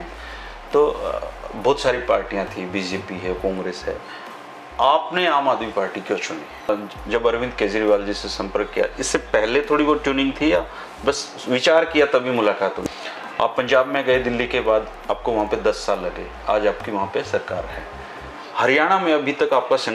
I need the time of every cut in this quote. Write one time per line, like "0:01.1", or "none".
0:06.7
0:12.8